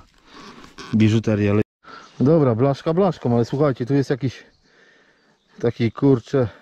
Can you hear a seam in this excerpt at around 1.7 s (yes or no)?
yes